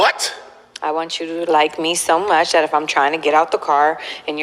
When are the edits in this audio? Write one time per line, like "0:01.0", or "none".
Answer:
none